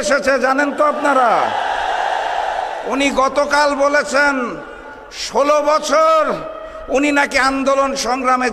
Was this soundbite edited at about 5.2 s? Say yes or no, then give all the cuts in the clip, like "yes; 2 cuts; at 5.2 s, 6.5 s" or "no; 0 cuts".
no; 0 cuts